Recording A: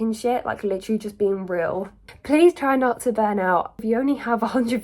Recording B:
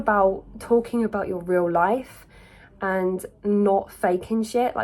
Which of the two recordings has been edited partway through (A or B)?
A